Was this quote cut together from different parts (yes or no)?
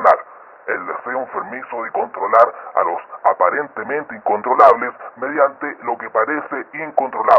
no